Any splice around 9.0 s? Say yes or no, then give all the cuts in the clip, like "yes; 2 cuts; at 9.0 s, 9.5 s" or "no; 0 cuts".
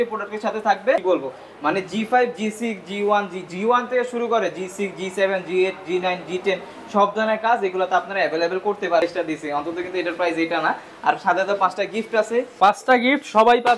yes; 2 cuts; at 1.0 s, 9.0 s